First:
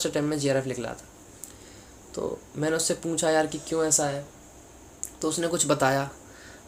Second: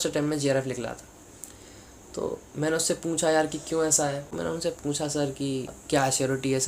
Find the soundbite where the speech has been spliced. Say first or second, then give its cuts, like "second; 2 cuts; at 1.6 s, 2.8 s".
second; 2 cuts; at 4.3 s, 5.8 s